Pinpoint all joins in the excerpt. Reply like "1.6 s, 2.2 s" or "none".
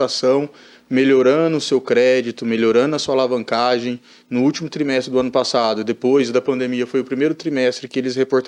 none